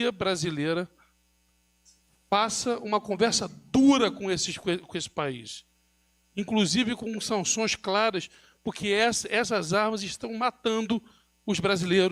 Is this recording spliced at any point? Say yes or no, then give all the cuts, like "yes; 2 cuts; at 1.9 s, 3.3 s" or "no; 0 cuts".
no; 0 cuts